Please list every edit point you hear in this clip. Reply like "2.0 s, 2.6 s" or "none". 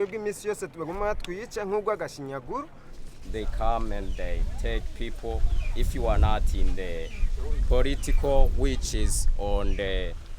2.8 s